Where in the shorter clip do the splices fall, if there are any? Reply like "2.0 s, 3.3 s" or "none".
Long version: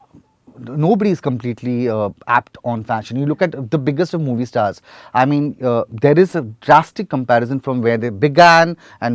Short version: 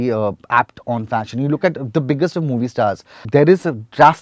3.2 s